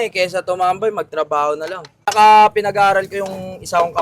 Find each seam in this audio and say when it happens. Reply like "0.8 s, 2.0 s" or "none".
2.1 s